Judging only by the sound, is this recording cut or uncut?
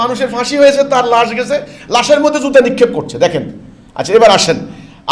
uncut